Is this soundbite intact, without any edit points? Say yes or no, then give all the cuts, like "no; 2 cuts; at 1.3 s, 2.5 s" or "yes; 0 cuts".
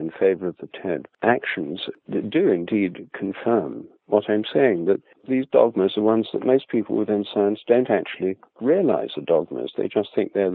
no; 3 cuts; at 1.1 s, 1.9 s, 5.1 s